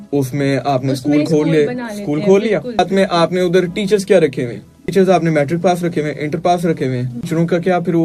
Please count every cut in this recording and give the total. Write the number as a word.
three